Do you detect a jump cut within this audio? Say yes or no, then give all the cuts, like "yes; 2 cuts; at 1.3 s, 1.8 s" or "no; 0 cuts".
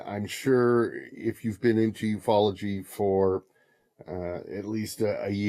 yes; 1 cut; at 1.5 s